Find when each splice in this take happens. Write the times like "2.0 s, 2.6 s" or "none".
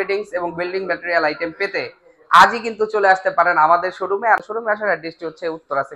4.4 s